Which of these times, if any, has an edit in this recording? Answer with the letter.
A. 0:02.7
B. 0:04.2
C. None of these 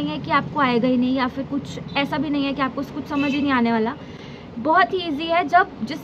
C